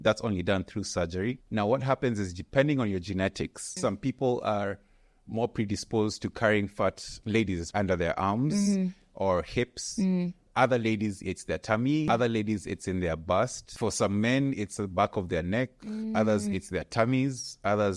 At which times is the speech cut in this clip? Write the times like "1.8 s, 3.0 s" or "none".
1.4 s, 3.7 s, 7.4 s, 10.4 s, 12.1 s